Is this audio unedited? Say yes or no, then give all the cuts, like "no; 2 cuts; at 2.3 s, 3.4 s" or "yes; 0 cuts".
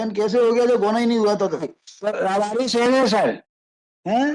yes; 0 cuts